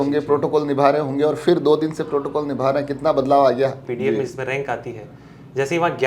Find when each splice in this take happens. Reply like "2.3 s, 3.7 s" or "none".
3.8 s